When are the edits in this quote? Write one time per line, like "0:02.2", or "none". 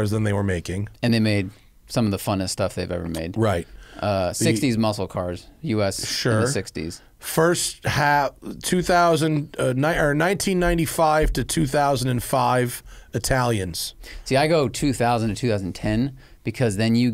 none